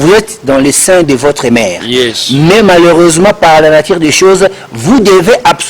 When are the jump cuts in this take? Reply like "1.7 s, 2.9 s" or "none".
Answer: none